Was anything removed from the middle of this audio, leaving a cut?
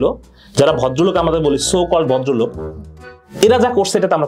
no; 0 cuts

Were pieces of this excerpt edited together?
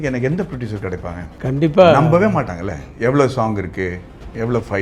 yes; 1 cut; at 1.2 s

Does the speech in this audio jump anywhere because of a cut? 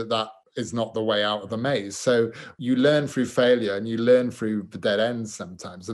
yes; 1 cut; at 2.5 s

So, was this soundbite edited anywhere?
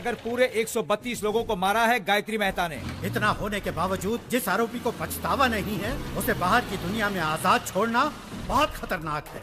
yes; 1 cut; at 2.7 s

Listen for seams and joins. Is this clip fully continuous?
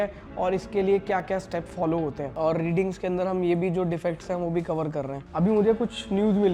no; 2 cuts; at 2.3 s, 5.2 s

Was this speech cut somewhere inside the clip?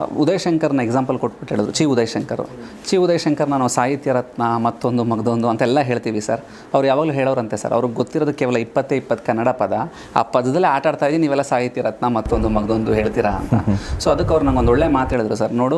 no; 0 cuts

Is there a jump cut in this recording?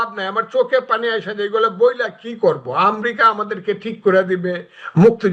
no; 0 cuts

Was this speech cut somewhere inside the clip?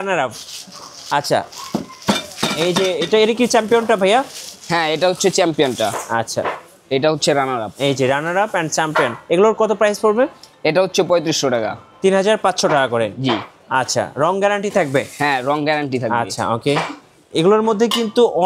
no; 0 cuts

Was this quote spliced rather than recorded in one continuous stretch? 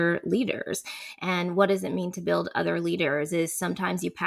no; 0 cuts

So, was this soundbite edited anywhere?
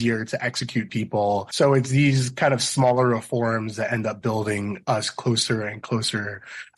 yes; 1 cut; at 1.5 s

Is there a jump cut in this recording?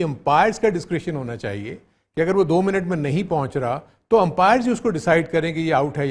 no; 0 cuts

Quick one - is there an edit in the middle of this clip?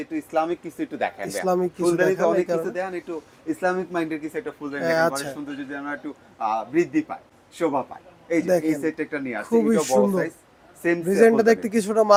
no; 0 cuts

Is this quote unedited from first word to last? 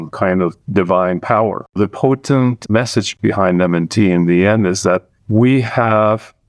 no; 2 cuts; at 1.7 s, 3.1 s

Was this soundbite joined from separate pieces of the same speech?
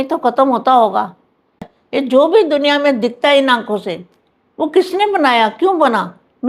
yes; 1 cut; at 1.6 s

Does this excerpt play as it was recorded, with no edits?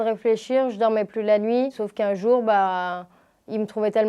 yes; 0 cuts

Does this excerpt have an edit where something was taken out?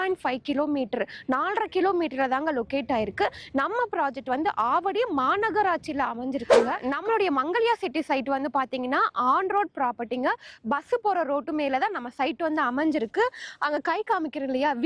no; 0 cuts

